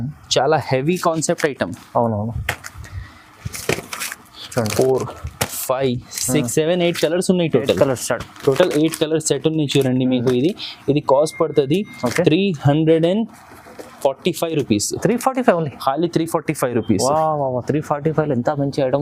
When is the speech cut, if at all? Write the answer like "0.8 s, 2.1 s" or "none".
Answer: none